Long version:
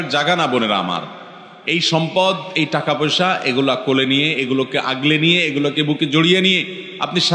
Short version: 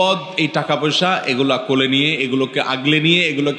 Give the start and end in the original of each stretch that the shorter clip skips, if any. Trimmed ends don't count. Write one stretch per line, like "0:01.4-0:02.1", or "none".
none